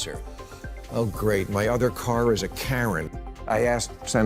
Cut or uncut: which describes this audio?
cut